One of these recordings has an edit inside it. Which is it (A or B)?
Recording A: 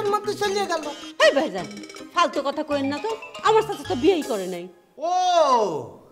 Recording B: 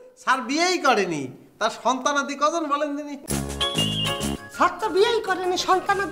B